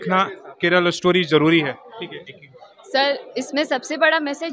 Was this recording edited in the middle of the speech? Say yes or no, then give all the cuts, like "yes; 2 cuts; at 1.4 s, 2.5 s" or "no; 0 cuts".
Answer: no; 0 cuts